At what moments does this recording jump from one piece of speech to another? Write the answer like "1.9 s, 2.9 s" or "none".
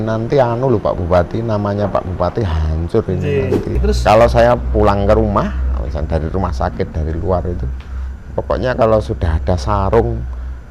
3.8 s